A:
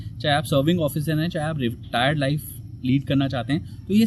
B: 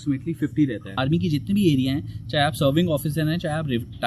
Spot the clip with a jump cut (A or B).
B